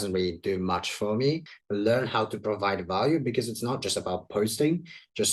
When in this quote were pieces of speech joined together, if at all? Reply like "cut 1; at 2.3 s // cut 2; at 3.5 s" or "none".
cut 1; at 1.5 s